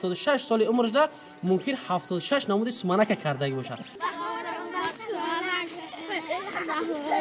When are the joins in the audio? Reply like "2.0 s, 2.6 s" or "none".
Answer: 3.9 s